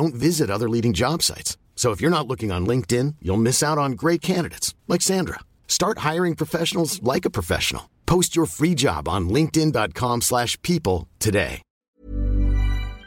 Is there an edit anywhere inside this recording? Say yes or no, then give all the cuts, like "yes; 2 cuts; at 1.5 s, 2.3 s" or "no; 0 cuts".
yes; 1 cut; at 11.9 s